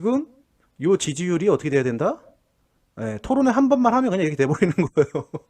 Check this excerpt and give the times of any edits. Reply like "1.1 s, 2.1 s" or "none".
none